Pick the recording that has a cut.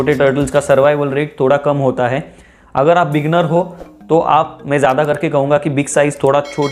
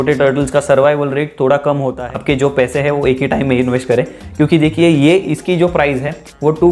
second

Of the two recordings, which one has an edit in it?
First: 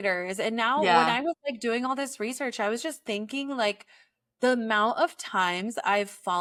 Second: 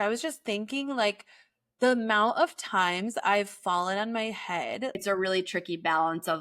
second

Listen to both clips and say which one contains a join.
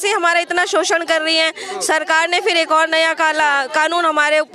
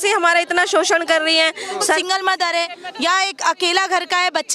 second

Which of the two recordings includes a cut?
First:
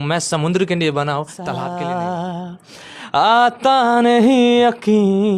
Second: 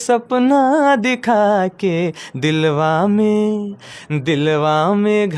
first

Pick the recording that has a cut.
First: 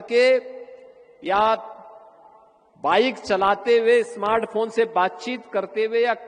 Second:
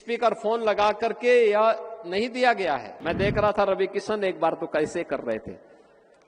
second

